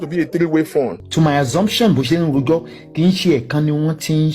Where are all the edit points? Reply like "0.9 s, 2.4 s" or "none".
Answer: 1.0 s